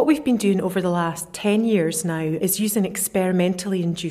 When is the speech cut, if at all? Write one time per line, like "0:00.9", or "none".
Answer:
0:01.3
0:02.4